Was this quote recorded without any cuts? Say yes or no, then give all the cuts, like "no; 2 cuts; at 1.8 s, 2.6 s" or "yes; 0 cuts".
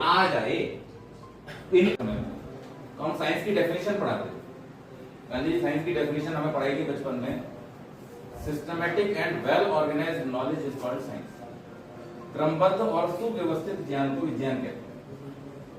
no; 1 cut; at 2.0 s